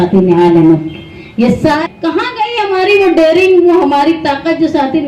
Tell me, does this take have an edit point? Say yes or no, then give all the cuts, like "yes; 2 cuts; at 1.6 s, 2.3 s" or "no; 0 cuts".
yes; 1 cut; at 1.8 s